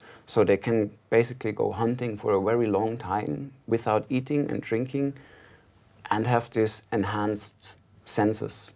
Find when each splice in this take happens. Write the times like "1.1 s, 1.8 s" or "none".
none